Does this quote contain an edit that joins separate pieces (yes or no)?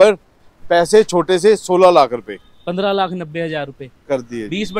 no